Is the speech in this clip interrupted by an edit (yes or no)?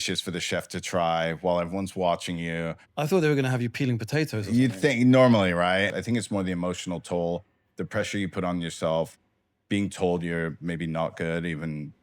yes